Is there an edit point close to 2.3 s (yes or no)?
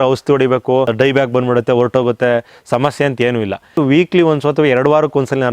no